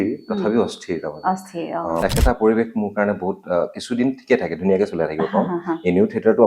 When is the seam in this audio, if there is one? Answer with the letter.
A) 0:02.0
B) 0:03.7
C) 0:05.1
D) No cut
A